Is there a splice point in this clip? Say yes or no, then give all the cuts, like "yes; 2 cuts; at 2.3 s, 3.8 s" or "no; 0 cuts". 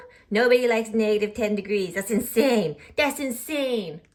no; 0 cuts